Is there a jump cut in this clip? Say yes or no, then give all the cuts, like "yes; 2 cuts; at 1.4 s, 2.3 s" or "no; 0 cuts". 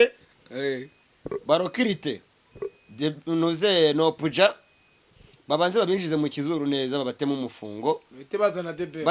no; 0 cuts